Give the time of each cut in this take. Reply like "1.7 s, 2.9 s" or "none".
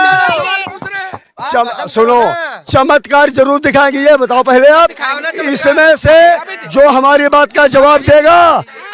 none

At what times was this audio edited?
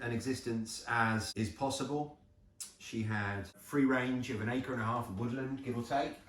1.3 s, 3.6 s

